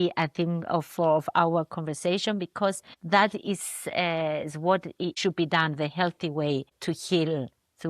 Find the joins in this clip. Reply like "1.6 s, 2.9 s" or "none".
2.9 s, 5.1 s, 6.7 s

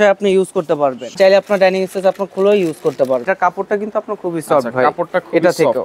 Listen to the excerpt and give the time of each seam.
1.1 s, 3.2 s

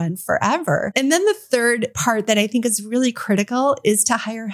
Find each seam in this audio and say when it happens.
0.9 s, 1.9 s

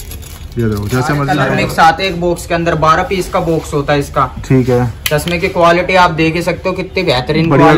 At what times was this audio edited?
1.4 s

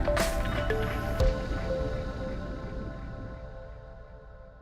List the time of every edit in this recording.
none

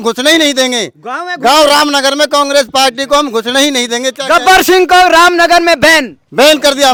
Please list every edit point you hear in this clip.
none

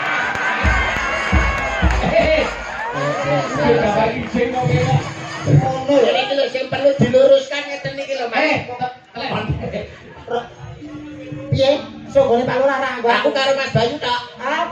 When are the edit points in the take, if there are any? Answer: 9.4 s

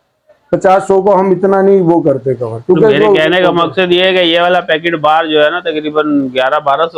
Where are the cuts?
none

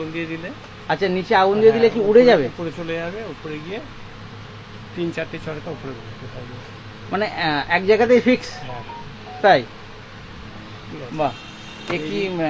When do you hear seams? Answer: none

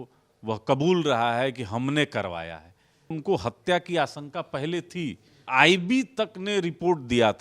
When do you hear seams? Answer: 3.2 s, 5.5 s

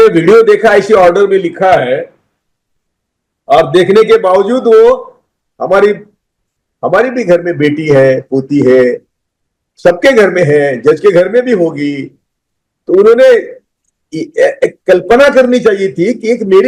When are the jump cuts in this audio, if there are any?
none

